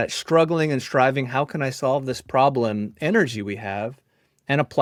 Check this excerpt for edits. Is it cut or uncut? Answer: uncut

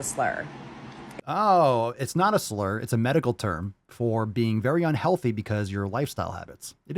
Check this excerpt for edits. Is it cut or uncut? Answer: uncut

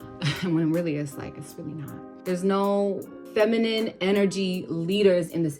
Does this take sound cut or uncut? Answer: cut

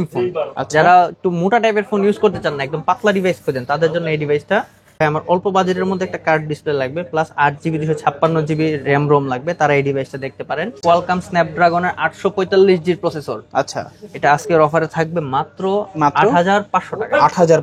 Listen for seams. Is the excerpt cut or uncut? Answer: cut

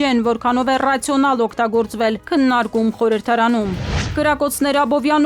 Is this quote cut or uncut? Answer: cut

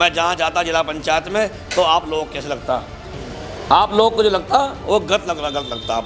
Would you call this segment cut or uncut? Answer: uncut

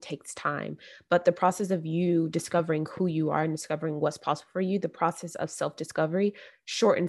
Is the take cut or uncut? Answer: uncut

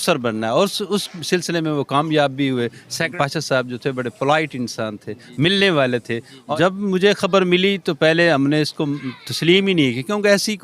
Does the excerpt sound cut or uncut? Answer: cut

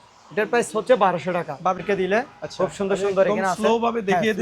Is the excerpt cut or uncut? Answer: cut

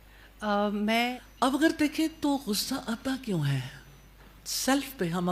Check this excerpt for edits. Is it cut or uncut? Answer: cut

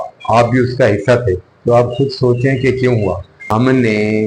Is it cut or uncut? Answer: cut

